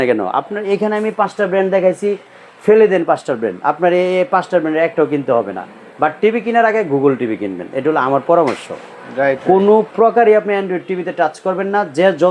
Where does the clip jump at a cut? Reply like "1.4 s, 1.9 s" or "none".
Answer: none